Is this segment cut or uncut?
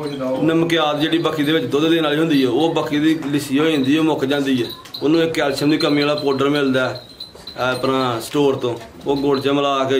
uncut